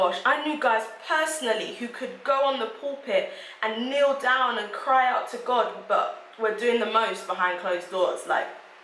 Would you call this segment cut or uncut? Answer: uncut